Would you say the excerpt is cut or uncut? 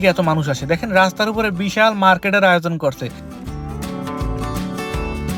uncut